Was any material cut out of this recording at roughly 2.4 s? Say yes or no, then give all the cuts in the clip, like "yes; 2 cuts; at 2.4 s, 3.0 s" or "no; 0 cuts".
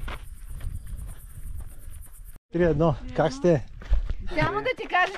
yes; 1 cut; at 2.4 s